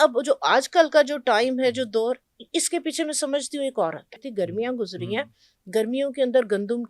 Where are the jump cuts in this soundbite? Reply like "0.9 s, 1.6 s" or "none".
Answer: 4.3 s